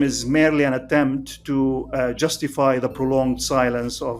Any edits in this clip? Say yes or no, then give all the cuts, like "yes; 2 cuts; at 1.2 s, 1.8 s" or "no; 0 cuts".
no; 0 cuts